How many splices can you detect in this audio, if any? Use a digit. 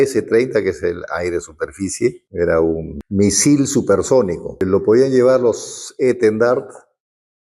3